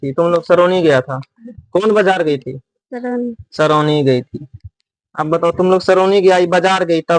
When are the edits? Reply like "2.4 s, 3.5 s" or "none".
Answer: none